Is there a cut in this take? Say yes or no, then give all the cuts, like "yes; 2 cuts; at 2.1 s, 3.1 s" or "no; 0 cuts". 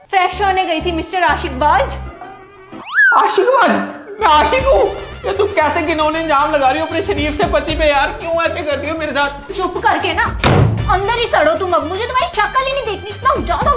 no; 0 cuts